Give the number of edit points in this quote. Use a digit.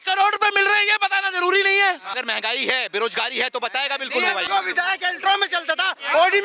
2